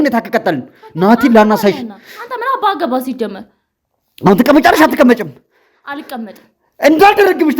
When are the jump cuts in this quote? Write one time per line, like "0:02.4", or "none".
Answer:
none